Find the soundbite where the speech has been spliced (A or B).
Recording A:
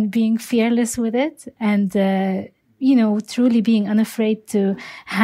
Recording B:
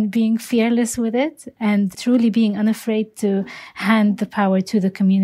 B